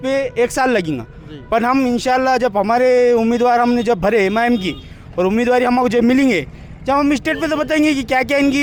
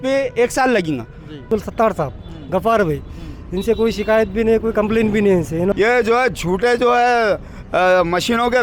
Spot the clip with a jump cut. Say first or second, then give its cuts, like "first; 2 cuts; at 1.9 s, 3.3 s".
second; 2 cuts; at 1.5 s, 5.7 s